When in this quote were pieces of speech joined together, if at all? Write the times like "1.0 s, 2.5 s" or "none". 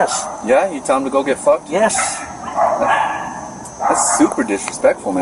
none